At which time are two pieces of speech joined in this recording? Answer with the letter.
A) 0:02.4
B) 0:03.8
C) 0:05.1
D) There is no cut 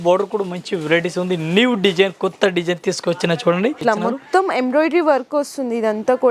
B